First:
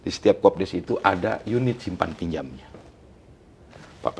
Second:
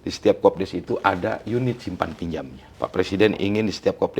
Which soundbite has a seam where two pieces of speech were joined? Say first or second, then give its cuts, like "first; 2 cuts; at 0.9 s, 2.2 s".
second; 1 cut; at 2.6 s